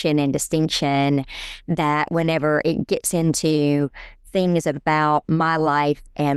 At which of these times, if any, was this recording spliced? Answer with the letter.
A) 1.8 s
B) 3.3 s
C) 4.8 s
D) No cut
D